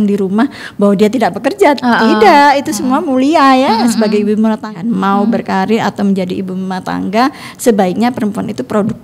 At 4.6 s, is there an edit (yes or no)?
yes